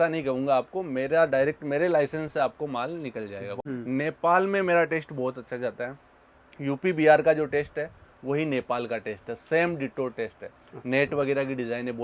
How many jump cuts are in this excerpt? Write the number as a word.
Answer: one